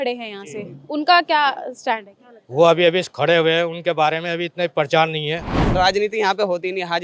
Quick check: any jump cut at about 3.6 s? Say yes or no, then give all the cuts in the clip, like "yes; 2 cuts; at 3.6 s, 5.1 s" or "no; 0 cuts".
no; 1 cut; at 5.6 s